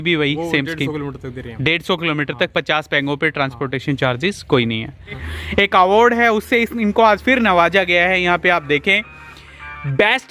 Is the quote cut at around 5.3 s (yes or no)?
yes